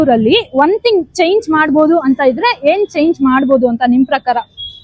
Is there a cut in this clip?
no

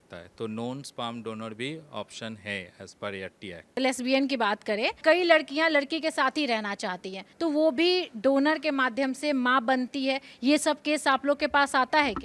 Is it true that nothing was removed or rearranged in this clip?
no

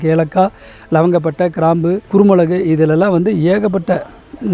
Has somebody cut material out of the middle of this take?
yes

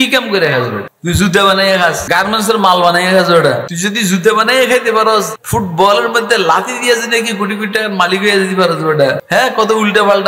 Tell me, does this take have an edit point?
yes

